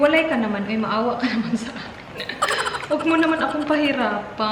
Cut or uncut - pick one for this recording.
uncut